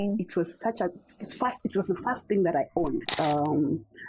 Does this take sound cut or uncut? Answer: cut